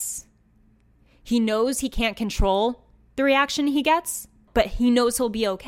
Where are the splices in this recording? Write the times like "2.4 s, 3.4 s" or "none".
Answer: 4.4 s